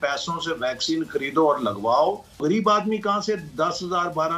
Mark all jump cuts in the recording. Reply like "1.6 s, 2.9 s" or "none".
2.4 s